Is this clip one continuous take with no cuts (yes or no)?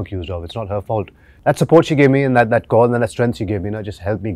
yes